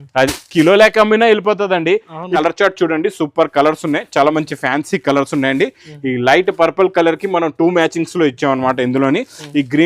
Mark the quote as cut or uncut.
cut